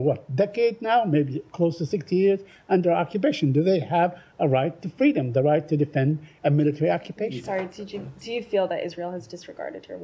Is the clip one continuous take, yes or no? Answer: no